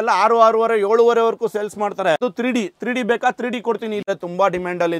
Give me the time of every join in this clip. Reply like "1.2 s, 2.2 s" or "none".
2.2 s, 4.0 s